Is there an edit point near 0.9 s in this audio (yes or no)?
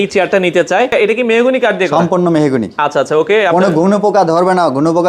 yes